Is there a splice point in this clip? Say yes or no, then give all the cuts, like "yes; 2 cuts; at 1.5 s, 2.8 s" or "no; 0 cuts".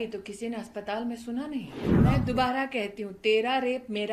yes; 1 cut; at 1.8 s